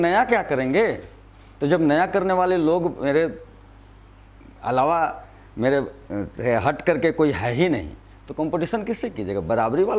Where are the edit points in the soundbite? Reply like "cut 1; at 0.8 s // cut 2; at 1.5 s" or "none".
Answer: none

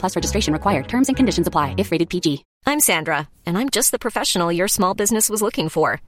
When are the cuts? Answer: cut 1; at 2.5 s

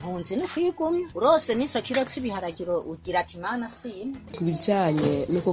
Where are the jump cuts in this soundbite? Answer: cut 1; at 4.3 s

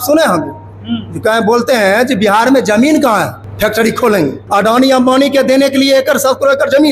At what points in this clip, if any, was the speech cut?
cut 1; at 3.4 s // cut 2; at 4.4 s

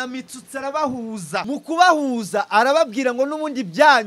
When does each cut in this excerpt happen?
cut 1; at 1.4 s

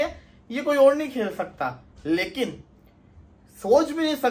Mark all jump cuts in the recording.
none

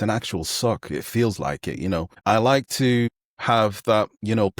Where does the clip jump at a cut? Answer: cut 1; at 2.2 s

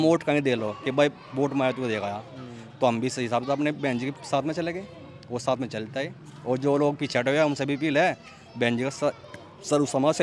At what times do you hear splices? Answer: none

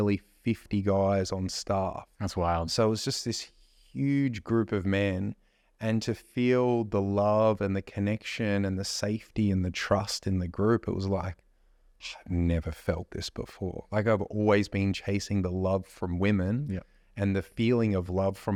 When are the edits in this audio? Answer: none

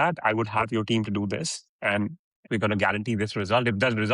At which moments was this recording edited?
cut 1; at 2.4 s

